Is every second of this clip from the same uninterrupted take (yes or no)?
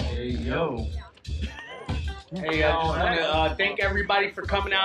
no